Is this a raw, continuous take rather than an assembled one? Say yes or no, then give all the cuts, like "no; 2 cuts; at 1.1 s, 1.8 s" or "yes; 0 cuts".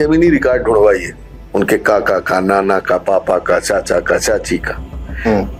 yes; 0 cuts